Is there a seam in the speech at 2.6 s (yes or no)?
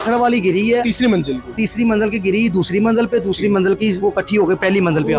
no